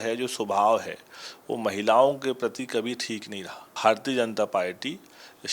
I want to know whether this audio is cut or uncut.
cut